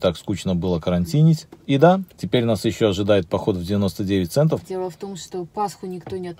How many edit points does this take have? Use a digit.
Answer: 3